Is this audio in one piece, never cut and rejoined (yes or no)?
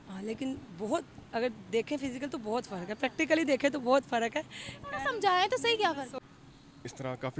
no